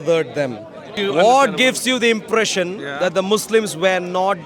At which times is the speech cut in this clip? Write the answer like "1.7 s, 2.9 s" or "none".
0.9 s